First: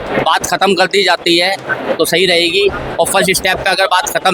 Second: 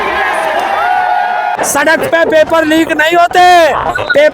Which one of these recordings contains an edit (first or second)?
second